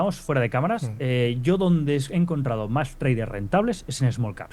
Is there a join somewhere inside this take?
no; 0 cuts

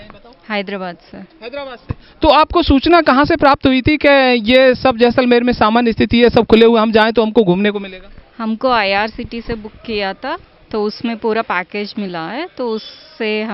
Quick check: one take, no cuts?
yes; 0 cuts

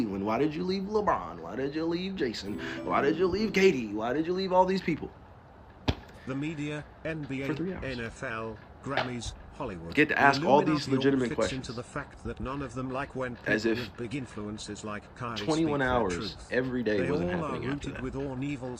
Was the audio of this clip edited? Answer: no; 0 cuts

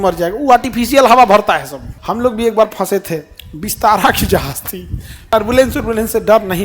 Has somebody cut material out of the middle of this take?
yes; 2 cuts; at 1.9 s, 5.3 s

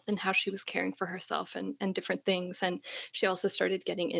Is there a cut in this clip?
no; 0 cuts

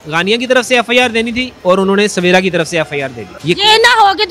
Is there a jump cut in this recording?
yes; 2 cuts; at 1.5 s, 3.3 s

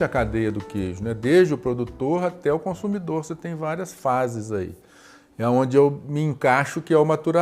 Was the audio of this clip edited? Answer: no; 0 cuts

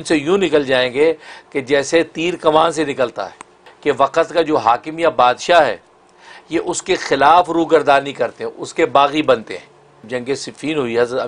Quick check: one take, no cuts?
no; 2 cuts; at 3.7 s, 10.0 s

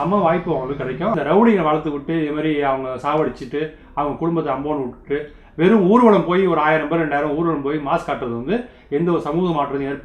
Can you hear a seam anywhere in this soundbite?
yes; 1 cut; at 1.1 s

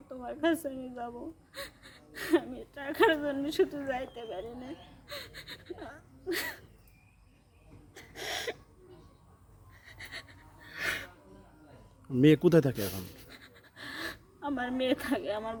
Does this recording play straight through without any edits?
yes; 0 cuts

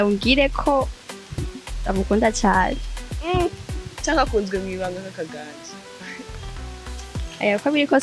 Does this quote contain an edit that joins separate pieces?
no; 0 cuts

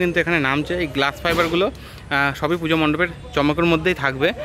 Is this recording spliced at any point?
no; 0 cuts

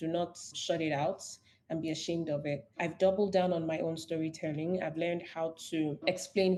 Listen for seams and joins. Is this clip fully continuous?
yes; 0 cuts

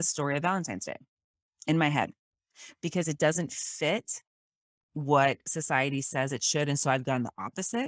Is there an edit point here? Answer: no; 0 cuts

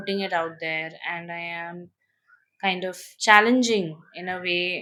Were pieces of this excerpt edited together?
no; 0 cuts

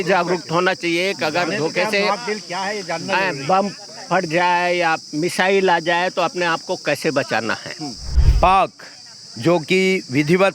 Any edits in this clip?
yes; 1 cut; at 8.2 s

